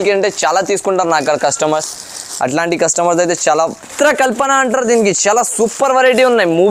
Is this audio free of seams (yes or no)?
no